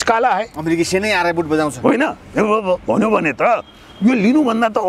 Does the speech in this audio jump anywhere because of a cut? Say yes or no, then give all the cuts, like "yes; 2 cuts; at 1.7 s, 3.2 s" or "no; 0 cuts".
no; 0 cuts